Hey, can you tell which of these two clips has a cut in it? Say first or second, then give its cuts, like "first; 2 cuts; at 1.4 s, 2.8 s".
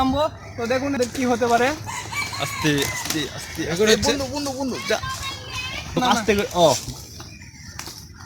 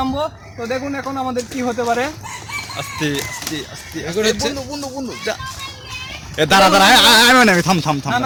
first; 2 cuts; at 1.0 s, 6.0 s